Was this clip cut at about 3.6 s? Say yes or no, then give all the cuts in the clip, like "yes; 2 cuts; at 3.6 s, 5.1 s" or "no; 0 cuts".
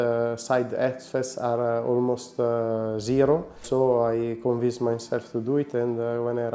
yes; 1 cut; at 3.6 s